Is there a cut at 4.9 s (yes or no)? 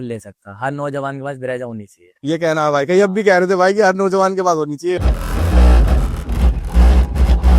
yes